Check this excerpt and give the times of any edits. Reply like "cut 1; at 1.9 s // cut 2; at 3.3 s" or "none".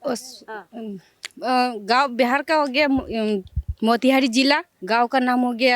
cut 1; at 4.7 s